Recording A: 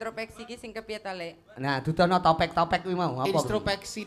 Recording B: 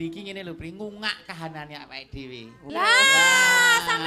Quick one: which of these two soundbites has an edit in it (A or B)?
B